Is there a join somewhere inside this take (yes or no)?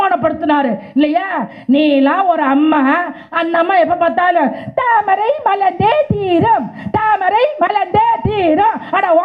no